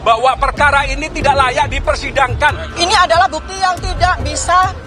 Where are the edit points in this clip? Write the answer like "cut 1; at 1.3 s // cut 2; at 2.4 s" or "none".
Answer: cut 1; at 2.7 s

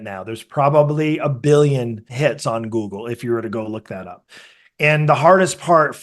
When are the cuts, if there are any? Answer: cut 1; at 2.1 s

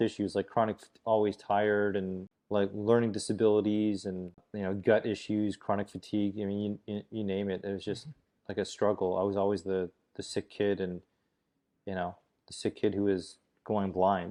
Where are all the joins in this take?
none

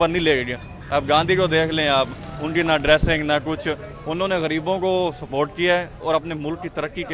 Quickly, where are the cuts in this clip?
none

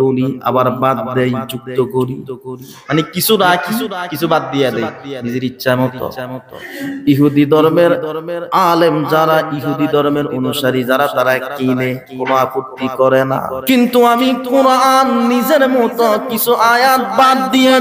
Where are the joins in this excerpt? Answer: cut 1; at 13.5 s

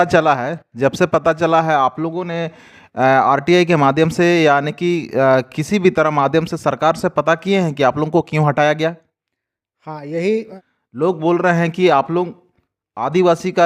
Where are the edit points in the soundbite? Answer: cut 1; at 10.5 s

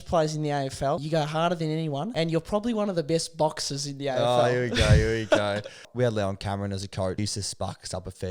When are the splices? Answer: cut 1; at 1.0 s // cut 2; at 2.1 s // cut 3; at 5.9 s // cut 4; at 7.2 s

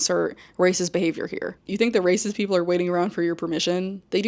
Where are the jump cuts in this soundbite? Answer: cut 1; at 1.6 s

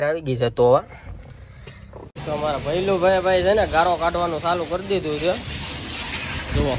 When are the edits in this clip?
cut 1; at 2.1 s // cut 2; at 3.9 s

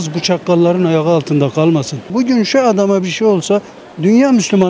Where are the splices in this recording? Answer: cut 1; at 2.1 s

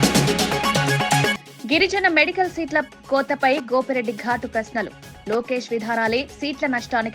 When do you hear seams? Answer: cut 1; at 1.3 s

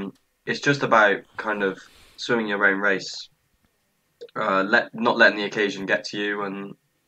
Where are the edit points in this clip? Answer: none

